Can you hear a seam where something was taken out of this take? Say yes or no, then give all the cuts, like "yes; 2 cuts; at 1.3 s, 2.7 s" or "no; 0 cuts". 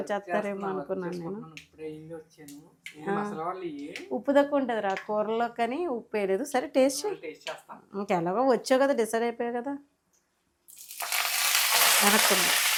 no; 0 cuts